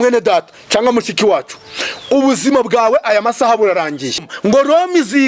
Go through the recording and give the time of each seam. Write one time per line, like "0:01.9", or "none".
0:04.3